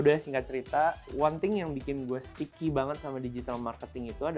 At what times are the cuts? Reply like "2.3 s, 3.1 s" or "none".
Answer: 1.0 s, 2.4 s

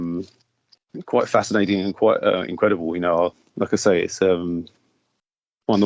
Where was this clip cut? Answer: 3.4 s

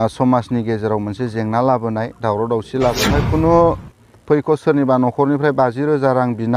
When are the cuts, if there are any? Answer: 3.1 s

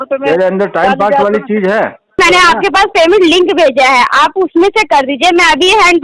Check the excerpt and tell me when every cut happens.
2.2 s

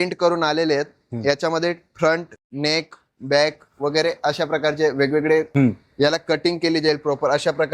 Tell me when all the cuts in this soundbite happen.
5.5 s

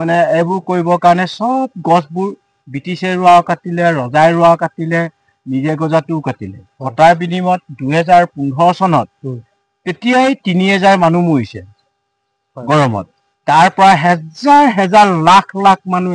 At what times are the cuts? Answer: none

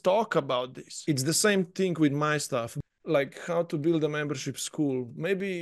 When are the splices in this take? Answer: 1.0 s, 2.8 s

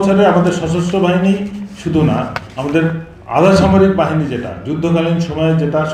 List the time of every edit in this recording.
none

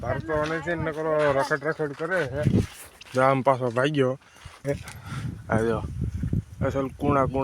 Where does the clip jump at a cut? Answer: 4.7 s

